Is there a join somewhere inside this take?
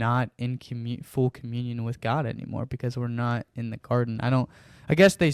no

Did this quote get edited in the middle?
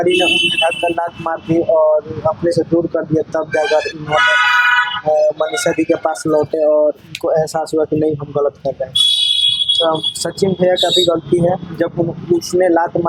no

